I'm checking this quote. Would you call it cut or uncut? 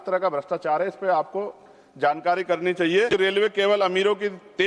cut